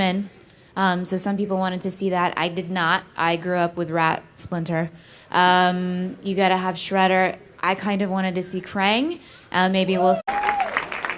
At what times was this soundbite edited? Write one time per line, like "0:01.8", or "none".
none